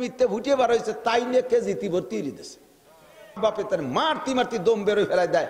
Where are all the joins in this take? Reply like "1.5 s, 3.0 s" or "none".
3.4 s

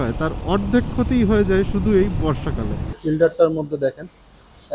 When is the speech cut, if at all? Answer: 3.0 s

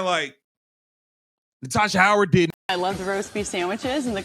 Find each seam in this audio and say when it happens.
2.7 s

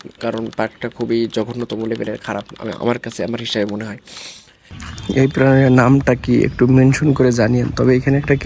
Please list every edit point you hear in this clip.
4.8 s

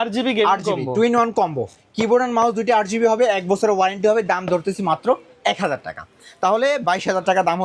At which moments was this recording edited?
none

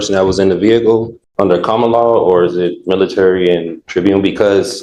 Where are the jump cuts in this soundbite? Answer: 1.2 s, 3.8 s

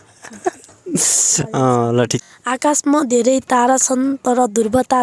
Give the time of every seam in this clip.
2.2 s

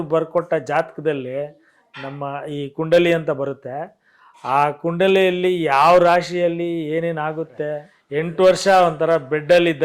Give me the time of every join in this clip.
7.9 s

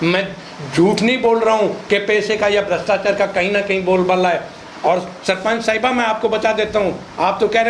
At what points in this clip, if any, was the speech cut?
none

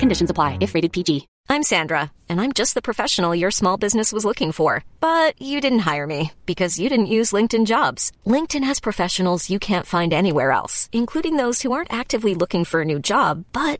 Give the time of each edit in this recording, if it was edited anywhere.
1.3 s

